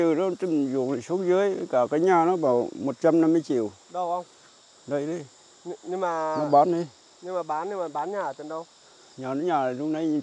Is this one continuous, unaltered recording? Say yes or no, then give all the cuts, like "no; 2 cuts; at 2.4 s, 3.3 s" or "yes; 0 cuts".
yes; 0 cuts